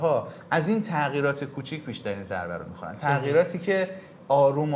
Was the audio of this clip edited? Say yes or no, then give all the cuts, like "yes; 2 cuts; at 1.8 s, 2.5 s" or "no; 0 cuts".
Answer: no; 0 cuts